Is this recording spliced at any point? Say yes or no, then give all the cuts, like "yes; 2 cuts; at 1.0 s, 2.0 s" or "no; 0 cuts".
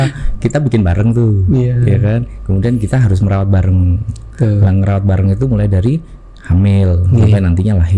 no; 0 cuts